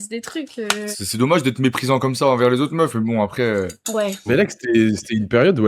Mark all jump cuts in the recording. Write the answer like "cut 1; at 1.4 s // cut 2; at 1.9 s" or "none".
cut 1; at 1.0 s // cut 2; at 4.3 s